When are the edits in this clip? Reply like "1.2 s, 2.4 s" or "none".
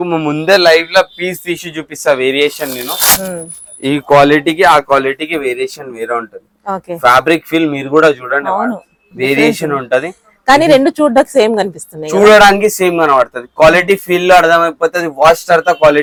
none